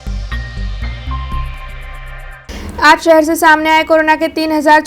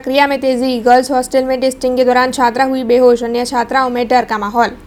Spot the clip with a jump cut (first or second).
first